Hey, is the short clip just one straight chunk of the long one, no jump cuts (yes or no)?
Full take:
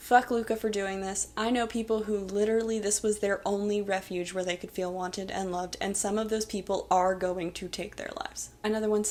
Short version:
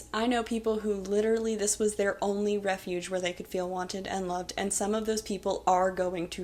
yes